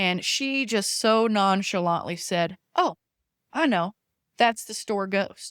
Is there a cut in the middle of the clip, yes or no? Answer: no